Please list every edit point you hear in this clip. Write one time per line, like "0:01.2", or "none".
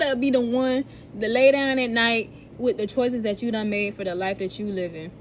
none